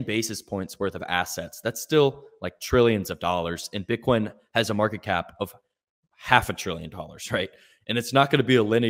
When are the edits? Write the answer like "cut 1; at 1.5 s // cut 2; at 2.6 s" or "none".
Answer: none